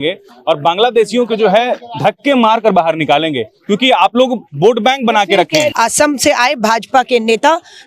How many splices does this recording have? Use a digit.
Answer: 1